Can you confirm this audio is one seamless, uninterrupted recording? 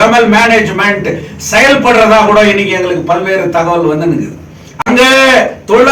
yes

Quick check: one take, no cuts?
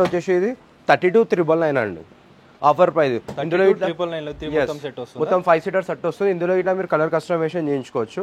yes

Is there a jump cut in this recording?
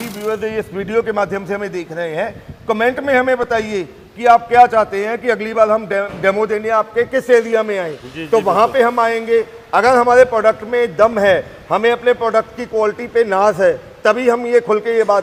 no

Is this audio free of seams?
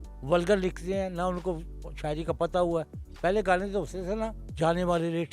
no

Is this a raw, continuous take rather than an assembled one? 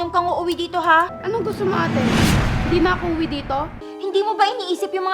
no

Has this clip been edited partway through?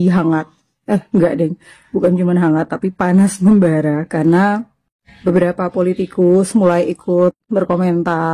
no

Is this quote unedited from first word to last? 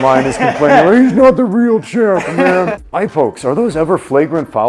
no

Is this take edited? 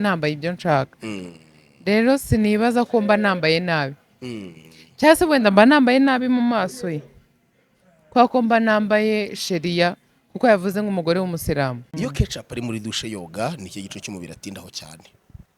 yes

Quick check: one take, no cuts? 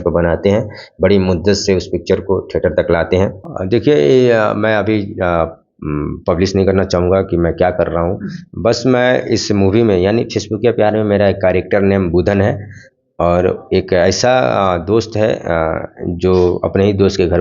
no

